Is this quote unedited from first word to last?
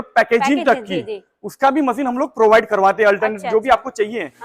yes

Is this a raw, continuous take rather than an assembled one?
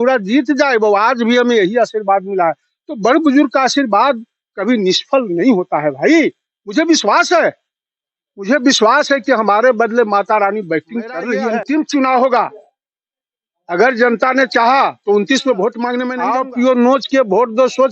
no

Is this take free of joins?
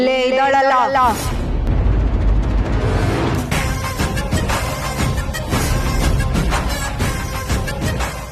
yes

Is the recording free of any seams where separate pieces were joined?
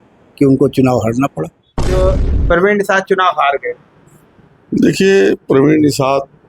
no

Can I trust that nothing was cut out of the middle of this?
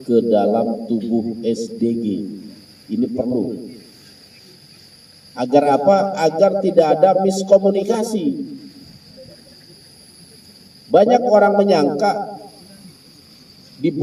yes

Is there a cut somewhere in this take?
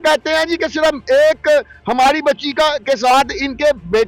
no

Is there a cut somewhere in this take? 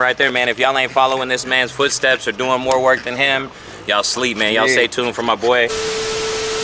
yes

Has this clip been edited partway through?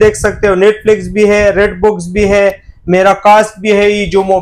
no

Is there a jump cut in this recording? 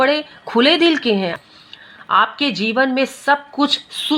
yes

